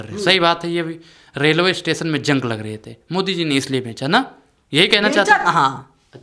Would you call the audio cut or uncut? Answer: uncut